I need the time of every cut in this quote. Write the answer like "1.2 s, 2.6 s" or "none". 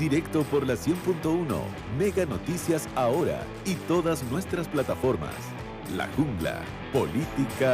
6.7 s

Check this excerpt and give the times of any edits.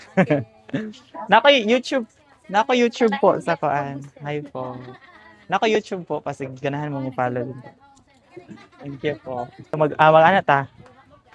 9.8 s

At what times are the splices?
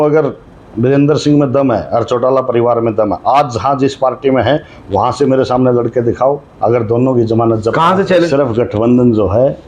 8.3 s

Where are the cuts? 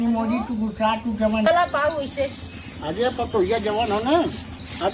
1.4 s

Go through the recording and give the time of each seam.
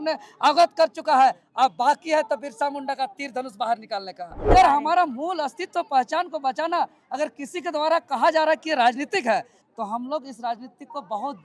4.5 s, 9.6 s

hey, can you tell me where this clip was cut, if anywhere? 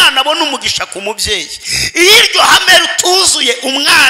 none

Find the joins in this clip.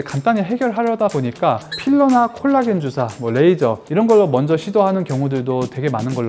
none

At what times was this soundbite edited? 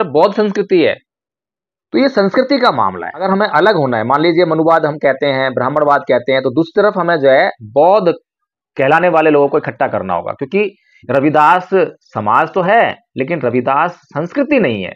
3.2 s

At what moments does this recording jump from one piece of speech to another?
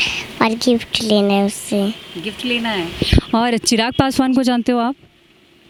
none

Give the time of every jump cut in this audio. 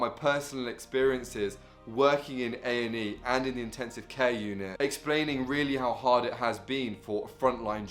none

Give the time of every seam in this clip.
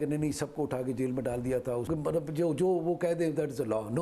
1.8 s

